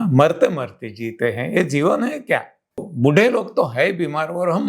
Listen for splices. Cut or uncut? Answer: cut